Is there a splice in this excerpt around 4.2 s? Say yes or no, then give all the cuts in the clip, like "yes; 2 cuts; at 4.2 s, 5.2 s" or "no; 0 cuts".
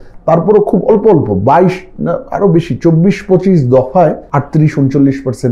yes; 1 cut; at 4.2 s